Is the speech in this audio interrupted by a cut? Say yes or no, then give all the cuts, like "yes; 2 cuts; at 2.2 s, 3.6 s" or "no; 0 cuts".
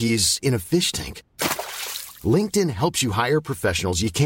no; 0 cuts